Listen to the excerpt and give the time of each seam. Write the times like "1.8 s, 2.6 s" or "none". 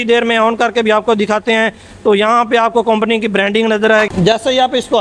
4.1 s